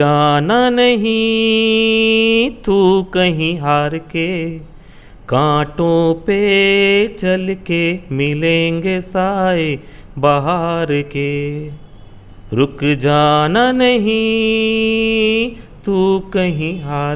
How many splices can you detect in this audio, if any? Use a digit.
0